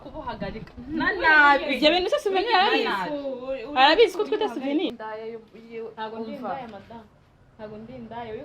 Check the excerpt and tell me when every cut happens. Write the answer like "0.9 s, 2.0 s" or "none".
4.9 s